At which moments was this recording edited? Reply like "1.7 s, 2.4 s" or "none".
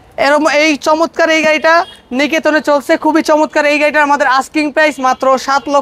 none